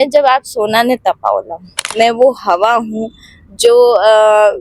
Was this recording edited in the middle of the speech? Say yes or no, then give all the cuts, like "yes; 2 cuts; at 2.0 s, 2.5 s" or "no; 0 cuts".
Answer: yes; 1 cut; at 1.8 s